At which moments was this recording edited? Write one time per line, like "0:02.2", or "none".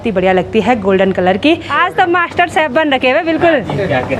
0:01.7